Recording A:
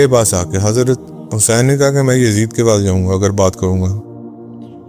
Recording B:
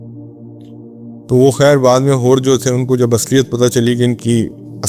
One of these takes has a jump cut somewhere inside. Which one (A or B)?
B